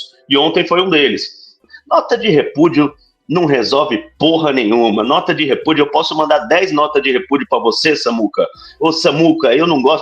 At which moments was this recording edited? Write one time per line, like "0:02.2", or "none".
0:01.6